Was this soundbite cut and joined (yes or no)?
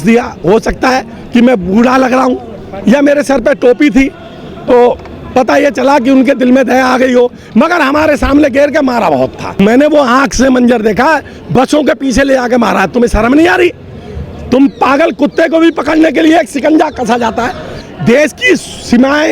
yes